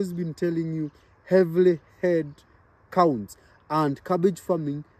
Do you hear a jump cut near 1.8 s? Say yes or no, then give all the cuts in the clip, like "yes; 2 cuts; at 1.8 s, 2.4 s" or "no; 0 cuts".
no; 0 cuts